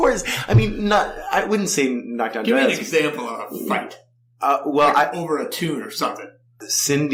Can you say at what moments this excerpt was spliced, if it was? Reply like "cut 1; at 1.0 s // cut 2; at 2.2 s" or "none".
none